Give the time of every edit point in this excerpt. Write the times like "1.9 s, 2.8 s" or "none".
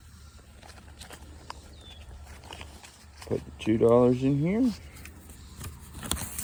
none